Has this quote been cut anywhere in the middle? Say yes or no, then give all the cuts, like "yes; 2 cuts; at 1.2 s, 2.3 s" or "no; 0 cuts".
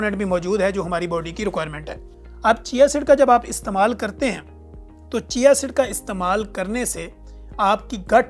no; 0 cuts